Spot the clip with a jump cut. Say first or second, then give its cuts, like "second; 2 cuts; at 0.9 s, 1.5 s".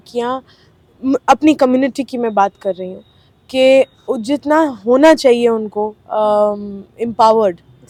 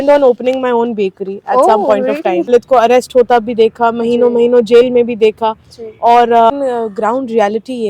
second; 2 cuts; at 2.5 s, 6.5 s